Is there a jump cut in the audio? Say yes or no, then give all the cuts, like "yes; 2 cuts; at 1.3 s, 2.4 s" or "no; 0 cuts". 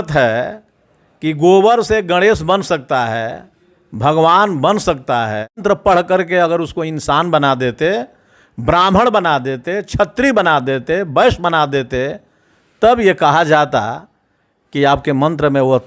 yes; 1 cut; at 5.6 s